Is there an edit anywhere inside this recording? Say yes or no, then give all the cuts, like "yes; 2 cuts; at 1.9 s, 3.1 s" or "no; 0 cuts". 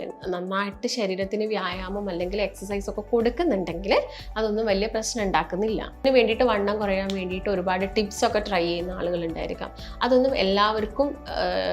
yes; 1 cut; at 6.1 s